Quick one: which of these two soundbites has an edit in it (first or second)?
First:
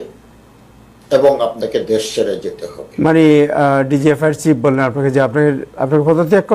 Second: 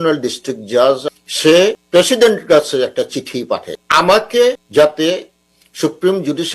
second